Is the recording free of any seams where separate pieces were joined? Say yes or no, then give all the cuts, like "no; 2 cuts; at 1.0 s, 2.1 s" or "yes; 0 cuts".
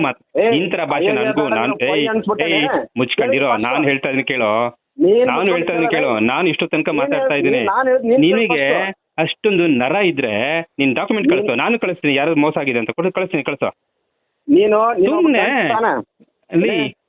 yes; 0 cuts